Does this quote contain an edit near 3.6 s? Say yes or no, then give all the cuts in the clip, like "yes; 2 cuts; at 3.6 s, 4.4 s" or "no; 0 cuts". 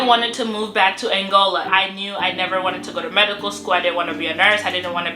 no; 1 cut; at 1.7 s